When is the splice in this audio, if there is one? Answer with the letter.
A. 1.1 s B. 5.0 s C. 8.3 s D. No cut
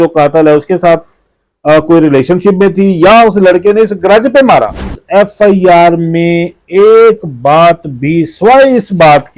B